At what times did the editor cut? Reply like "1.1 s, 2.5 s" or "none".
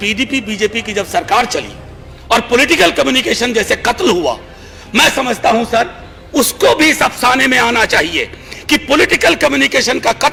none